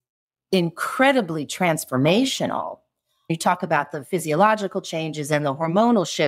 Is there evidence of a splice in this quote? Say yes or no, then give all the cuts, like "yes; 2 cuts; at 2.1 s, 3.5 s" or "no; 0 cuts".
yes; 1 cut; at 3.3 s